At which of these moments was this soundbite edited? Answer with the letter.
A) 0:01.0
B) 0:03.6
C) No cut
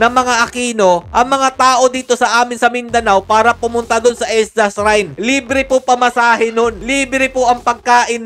C